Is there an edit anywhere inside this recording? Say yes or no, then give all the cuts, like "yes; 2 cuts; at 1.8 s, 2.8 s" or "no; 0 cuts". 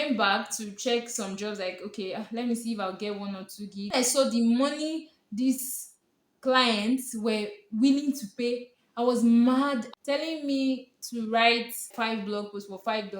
yes; 3 cuts; at 3.9 s, 9.9 s, 11.9 s